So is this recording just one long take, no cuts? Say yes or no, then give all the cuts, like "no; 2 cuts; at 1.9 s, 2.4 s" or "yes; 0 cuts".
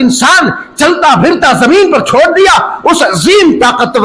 yes; 0 cuts